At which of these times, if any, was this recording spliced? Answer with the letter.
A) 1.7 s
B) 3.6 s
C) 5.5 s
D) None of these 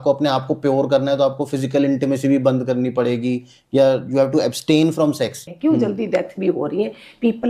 C